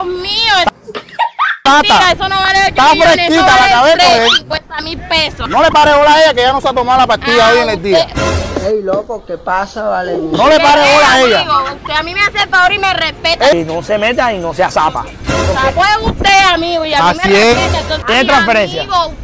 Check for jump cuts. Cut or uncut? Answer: cut